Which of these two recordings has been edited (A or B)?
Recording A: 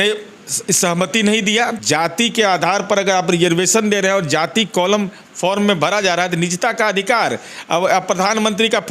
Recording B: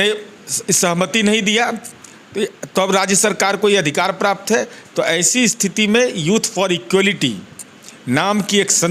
A